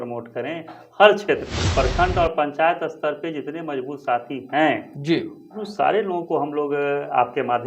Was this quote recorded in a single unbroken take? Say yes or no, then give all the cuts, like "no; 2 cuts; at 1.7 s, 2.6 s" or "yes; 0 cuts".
no; 1 cut; at 1.6 s